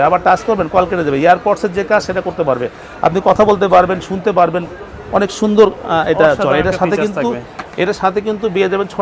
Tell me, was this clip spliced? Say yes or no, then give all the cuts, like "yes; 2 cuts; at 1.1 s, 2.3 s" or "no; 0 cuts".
no; 0 cuts